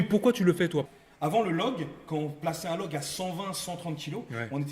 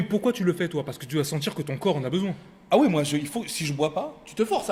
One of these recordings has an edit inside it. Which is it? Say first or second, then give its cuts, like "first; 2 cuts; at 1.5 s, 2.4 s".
first; 1 cut; at 1.0 s